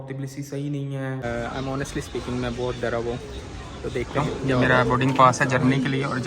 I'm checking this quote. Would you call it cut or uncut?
cut